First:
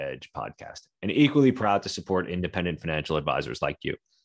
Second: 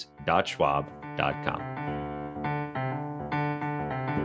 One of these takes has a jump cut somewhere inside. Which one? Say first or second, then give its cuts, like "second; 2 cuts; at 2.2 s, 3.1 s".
second; 1 cut; at 1.6 s